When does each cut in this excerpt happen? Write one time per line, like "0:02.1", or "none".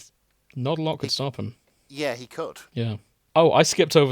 0:02.6